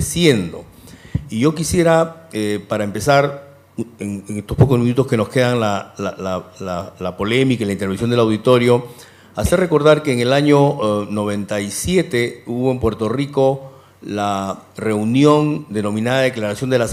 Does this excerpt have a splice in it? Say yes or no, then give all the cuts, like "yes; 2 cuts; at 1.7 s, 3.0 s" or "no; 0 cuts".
no; 0 cuts